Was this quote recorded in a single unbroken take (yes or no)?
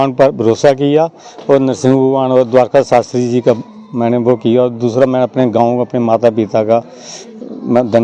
yes